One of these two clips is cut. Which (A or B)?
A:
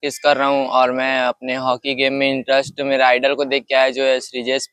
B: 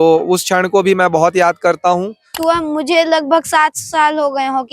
B